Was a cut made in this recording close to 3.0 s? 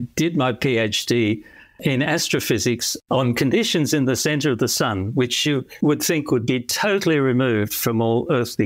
yes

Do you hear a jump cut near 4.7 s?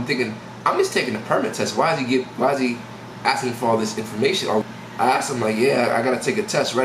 yes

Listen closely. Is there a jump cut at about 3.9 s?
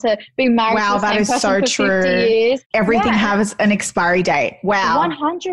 no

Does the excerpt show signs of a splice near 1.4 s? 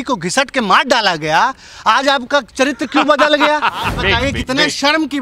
no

